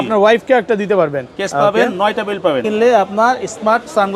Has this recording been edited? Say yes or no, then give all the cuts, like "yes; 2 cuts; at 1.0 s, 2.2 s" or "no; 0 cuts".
yes; 1 cut; at 2.6 s